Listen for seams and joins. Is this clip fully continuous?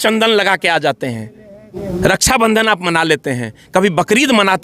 no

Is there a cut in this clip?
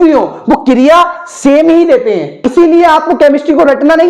yes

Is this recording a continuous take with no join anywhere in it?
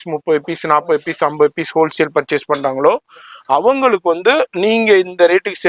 yes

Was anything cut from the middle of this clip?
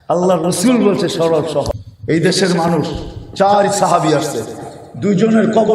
yes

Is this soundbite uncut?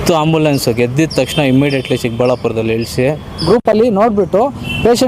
no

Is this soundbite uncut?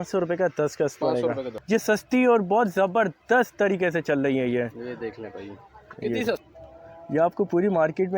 no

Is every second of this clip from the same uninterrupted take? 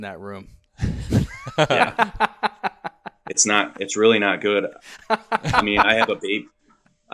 yes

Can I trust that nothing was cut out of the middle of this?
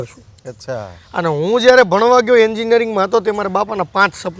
yes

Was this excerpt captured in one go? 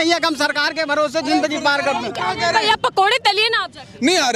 yes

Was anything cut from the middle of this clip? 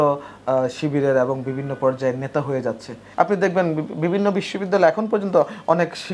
yes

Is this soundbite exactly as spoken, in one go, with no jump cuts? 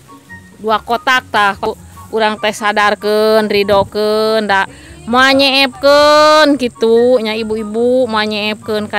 no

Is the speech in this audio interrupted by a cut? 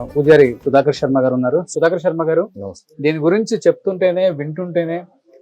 no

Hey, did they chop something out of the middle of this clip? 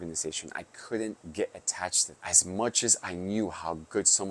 yes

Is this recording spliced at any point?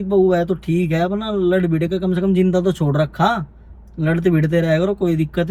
no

